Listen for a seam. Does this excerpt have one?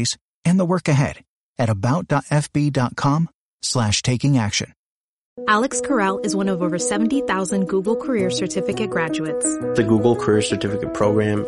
yes; 1 cut; at 5.4 s

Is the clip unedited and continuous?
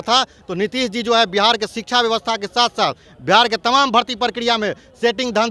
yes; 0 cuts

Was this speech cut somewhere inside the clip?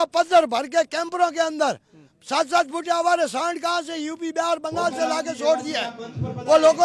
no; 0 cuts

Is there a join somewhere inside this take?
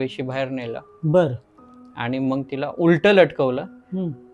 no; 0 cuts

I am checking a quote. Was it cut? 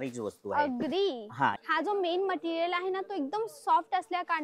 yes; 1 cut; at 1.6 s

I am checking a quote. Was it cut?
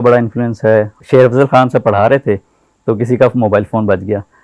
yes; 1 cut; at 1.0 s

